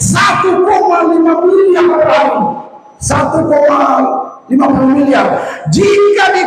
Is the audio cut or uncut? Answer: uncut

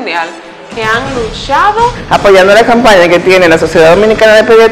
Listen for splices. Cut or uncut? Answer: cut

